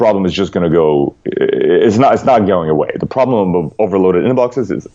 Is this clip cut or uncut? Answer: uncut